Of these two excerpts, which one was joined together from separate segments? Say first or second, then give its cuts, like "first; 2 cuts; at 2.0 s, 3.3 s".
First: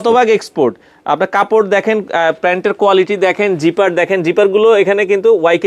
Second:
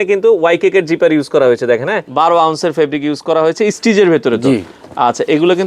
second; 1 cut; at 2.0 s